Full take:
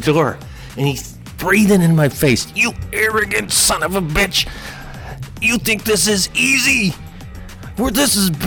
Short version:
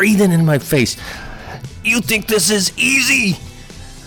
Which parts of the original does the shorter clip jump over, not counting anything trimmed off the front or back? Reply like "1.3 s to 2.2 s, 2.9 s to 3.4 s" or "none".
2.5 s to 4.6 s